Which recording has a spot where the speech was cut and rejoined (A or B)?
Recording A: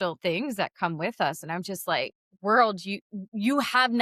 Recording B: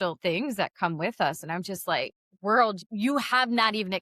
B